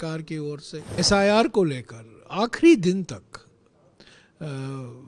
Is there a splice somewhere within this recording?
yes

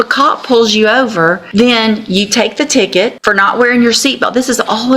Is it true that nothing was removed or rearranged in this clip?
no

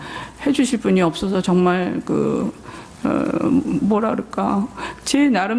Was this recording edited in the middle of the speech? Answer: no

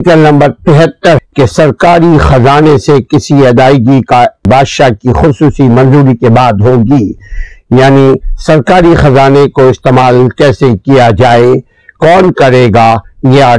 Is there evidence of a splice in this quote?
yes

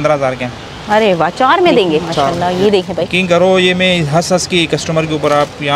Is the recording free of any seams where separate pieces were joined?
no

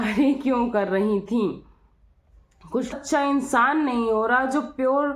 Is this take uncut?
no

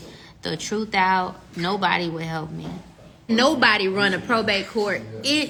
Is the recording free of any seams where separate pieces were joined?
yes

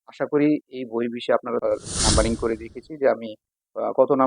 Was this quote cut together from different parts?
yes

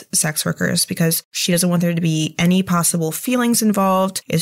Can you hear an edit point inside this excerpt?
yes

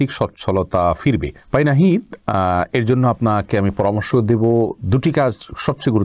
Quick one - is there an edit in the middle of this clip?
no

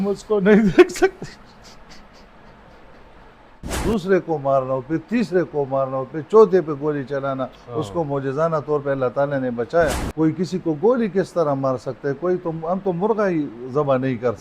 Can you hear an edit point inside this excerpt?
yes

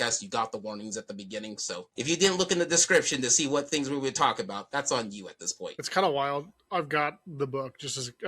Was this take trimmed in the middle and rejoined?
yes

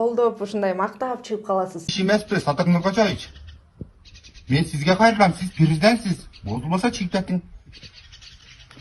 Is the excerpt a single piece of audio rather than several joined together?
no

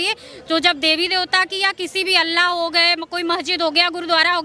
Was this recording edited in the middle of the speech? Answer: no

